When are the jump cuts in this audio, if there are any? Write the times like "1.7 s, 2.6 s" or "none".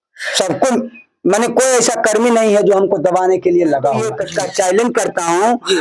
4.2 s

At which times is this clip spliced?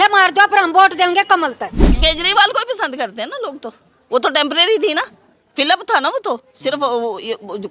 1.9 s

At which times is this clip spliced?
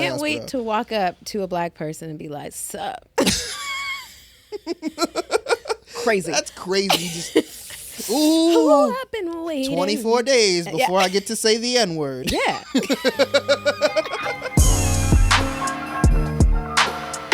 14.3 s

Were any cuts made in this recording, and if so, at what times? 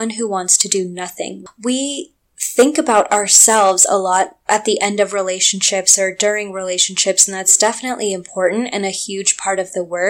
1.4 s

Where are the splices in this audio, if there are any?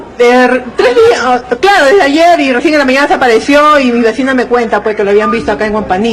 4.5 s

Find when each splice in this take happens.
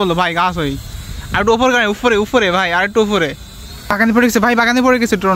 4.0 s

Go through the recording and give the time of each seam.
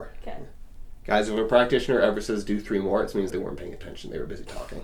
3.3 s

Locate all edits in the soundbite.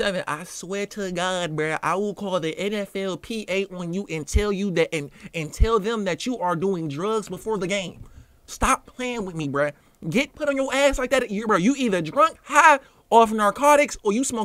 none

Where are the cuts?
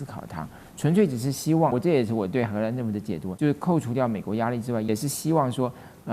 1.7 s, 3.3 s, 4.9 s

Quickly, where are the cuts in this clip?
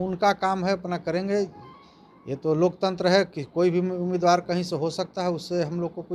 none

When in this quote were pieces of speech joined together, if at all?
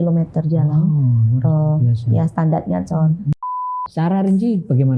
3.8 s

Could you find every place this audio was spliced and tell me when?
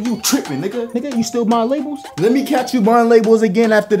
0.9 s, 2.1 s

